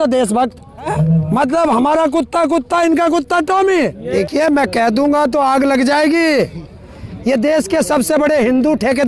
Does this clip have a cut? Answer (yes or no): yes